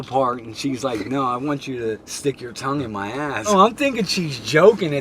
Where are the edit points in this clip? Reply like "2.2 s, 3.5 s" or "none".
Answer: 2.1 s, 3.5 s